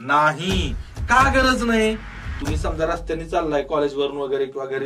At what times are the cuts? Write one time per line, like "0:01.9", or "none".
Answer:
0:02.3